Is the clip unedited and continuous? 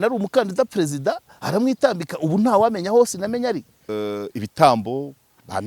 no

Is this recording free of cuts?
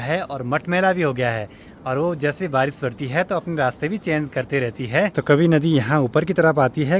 yes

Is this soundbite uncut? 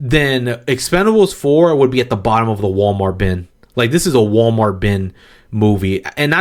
yes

